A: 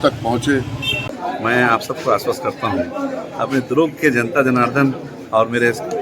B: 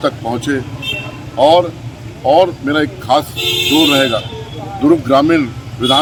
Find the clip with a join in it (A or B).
A